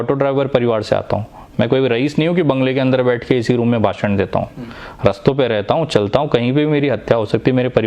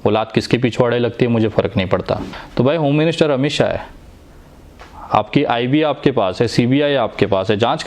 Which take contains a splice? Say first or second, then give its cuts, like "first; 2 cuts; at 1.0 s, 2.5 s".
second; 1 cut; at 2.4 s